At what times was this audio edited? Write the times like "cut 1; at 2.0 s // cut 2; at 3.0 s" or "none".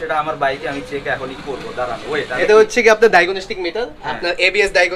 cut 1; at 2.3 s